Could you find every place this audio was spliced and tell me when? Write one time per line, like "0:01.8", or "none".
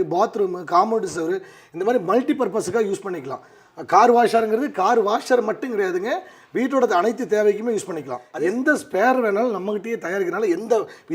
0:08.2

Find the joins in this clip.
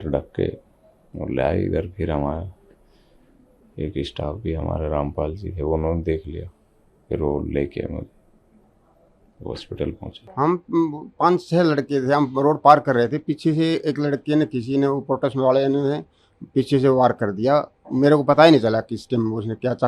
0:10.2

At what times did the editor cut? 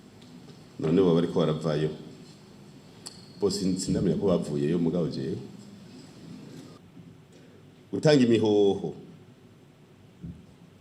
0:06.8

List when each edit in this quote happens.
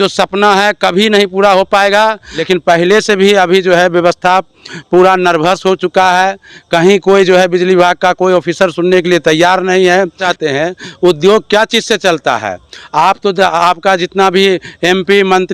0:02.3
0:10.2

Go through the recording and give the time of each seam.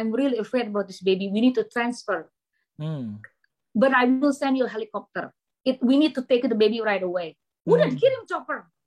none

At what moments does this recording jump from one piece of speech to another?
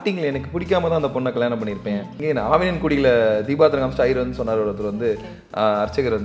0:02.1

